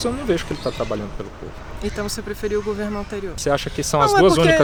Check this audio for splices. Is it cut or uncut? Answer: uncut